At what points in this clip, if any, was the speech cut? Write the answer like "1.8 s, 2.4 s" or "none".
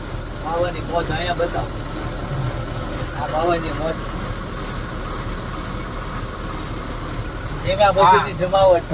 none